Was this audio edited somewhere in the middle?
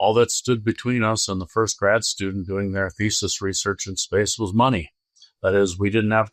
no; 0 cuts

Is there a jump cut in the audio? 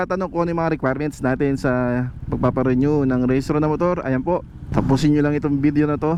no; 0 cuts

